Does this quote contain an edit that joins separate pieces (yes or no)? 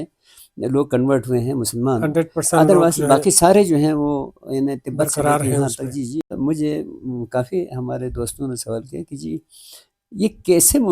yes